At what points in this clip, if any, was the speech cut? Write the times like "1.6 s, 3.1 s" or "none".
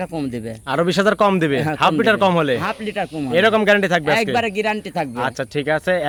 none